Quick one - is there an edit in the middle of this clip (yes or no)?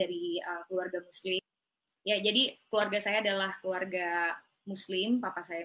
yes